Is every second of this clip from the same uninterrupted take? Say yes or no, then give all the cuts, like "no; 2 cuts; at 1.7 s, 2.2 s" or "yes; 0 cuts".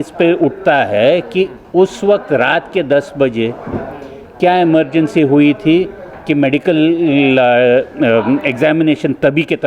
yes; 0 cuts